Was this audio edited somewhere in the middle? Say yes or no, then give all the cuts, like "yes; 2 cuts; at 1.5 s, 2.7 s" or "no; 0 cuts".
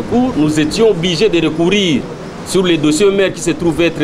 no; 0 cuts